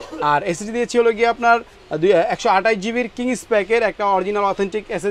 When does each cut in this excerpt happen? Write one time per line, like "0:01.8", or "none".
none